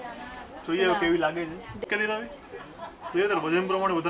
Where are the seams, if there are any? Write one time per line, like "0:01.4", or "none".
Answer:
0:01.9